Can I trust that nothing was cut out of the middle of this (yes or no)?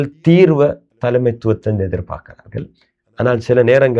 yes